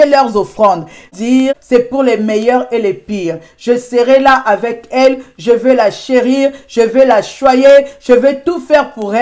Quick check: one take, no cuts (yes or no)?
no